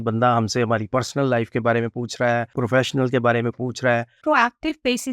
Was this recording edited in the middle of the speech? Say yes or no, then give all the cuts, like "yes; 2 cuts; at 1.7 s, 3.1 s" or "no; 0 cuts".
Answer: yes; 2 cuts; at 2.5 s, 4.2 s